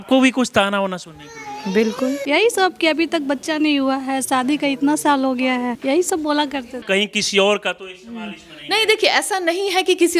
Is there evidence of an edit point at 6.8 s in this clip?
yes; 3 cuts; at 2.2 s, 5.8 s, 6.8 s

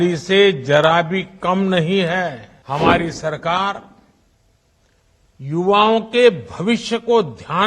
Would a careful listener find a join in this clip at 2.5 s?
yes; 1 cut; at 2.5 s

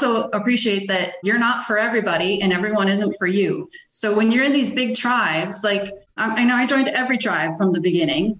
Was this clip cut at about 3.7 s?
no; 2 cuts; at 1.2 s, 6.0 s

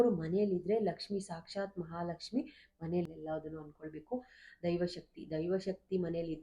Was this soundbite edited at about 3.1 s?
yes; 1 cut; at 3.1 s

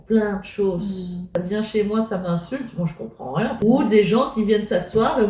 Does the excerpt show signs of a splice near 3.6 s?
yes; 2 cuts; at 1.2 s, 3.6 s

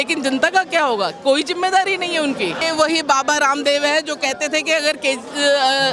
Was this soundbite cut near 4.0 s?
no; 1 cut; at 2.6 s

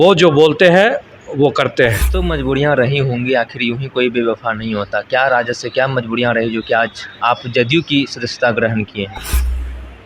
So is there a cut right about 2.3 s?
yes; 1 cut; at 2.3 s

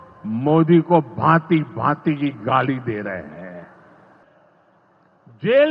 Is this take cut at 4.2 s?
yes; 1 cut; at 4.2 s

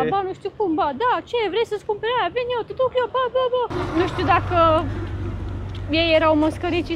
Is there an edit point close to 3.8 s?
yes; 1 cut; at 3.8 s

